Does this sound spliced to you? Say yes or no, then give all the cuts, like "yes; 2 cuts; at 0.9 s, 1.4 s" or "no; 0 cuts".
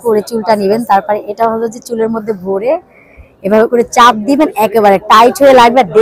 no; 0 cuts